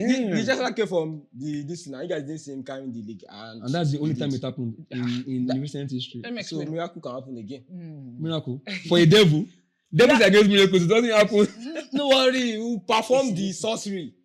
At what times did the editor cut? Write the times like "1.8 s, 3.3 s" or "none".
none